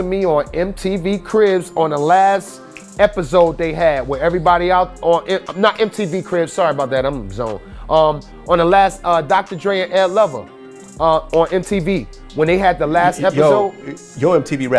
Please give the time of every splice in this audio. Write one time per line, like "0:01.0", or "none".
none